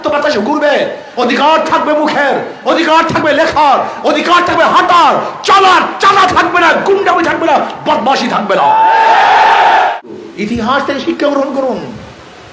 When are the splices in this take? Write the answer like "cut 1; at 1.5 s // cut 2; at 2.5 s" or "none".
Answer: cut 1; at 10.0 s